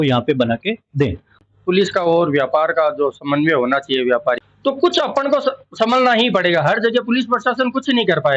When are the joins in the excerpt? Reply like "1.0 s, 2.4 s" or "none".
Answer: 1.4 s, 4.4 s

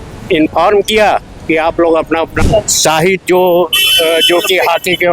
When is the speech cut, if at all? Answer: 2.4 s

